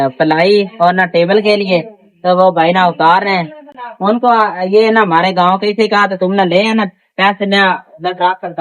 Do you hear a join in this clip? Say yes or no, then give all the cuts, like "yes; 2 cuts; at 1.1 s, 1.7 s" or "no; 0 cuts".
no; 0 cuts